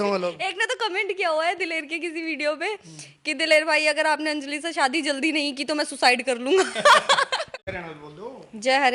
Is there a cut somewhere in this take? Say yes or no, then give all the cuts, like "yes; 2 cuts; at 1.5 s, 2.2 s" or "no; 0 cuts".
yes; 1 cut; at 7.7 s